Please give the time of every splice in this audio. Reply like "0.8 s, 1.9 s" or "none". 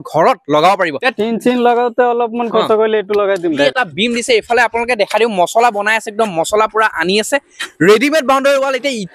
1.0 s, 3.7 s